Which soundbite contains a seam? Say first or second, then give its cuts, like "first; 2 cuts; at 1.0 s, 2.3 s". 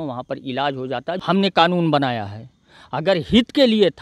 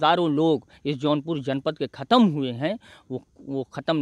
first; 1 cut; at 1.1 s